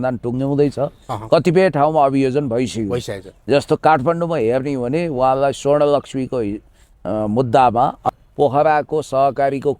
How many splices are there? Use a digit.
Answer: 1